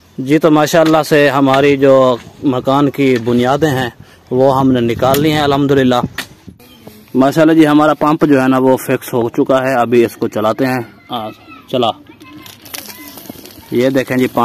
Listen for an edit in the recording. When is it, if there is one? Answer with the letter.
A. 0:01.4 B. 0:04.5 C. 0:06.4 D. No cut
C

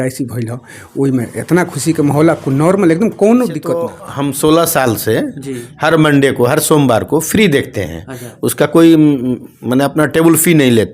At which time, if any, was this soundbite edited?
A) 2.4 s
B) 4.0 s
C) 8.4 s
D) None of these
B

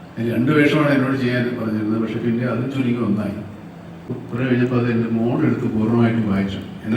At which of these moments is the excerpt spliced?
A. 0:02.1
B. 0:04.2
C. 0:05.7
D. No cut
B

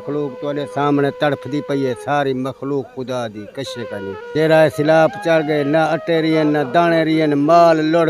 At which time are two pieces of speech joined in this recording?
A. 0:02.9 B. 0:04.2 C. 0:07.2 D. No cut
B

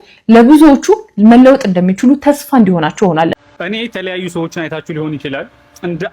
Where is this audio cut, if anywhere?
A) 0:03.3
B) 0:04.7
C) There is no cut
A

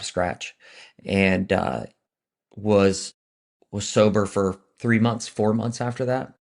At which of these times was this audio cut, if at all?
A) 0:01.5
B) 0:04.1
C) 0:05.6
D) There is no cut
D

